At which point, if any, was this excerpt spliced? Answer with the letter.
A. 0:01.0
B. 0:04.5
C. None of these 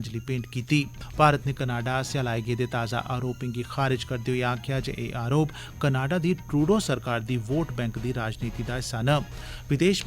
A